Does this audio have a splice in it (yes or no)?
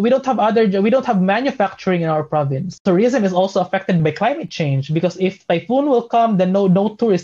yes